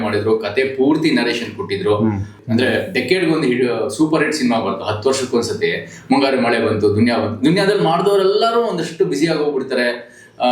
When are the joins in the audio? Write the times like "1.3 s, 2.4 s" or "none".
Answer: 2.3 s

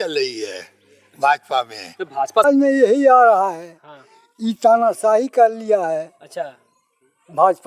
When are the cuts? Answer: 2.4 s

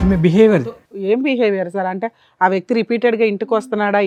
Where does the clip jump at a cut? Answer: none

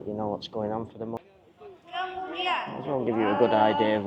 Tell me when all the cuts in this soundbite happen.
1.2 s

